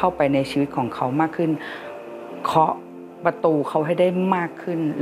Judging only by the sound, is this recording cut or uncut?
uncut